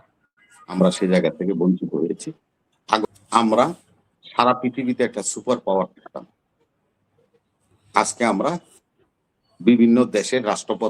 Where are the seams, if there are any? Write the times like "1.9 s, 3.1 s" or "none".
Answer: 3.1 s